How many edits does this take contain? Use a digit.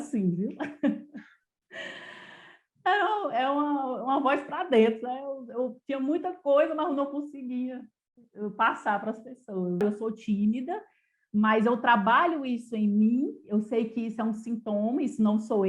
1